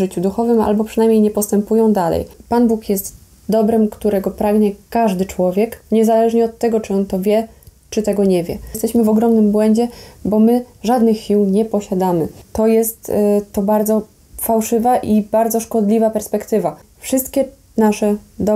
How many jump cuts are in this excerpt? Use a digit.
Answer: 4